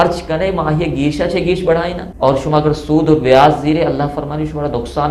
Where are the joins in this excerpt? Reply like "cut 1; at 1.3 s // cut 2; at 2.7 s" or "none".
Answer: cut 1; at 2.0 s